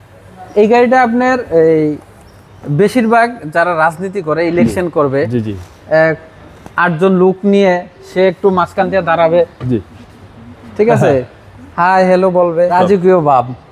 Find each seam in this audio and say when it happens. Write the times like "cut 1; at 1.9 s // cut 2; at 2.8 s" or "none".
cut 1; at 12.7 s